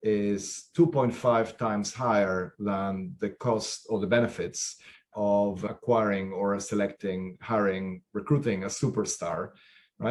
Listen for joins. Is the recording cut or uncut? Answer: uncut